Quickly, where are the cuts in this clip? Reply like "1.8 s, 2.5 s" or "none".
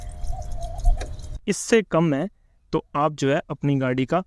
1.4 s

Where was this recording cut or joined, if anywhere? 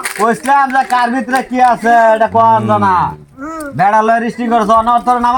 none

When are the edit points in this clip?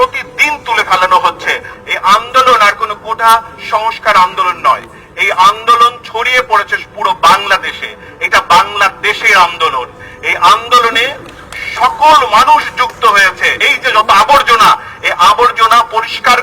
1.7 s, 13.7 s

